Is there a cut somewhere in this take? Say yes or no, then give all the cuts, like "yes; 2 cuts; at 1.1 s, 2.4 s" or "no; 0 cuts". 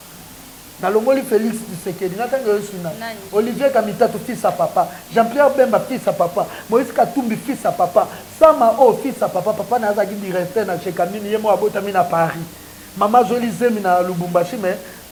no; 0 cuts